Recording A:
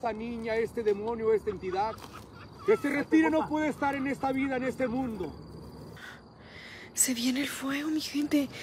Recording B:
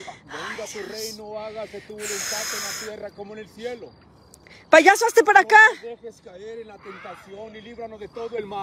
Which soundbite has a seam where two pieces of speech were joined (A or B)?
A